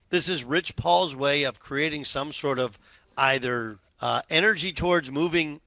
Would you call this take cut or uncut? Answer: cut